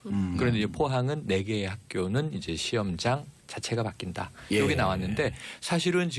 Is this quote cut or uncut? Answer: cut